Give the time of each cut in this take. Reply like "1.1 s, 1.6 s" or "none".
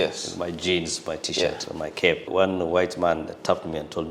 2.2 s